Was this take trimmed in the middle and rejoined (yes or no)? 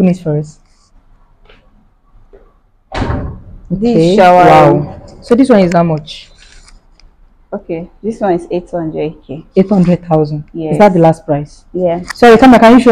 no